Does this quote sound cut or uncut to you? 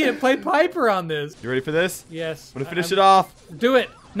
cut